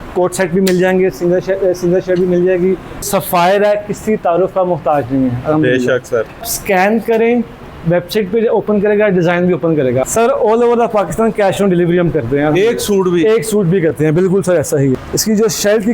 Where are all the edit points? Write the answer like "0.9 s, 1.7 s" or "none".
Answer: 3.0 s, 6.5 s, 10.1 s, 14.9 s